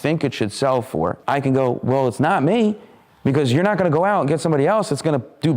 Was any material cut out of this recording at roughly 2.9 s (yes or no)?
no